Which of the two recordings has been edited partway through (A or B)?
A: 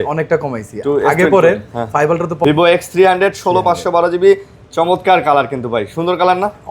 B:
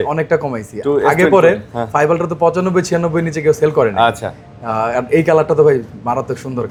A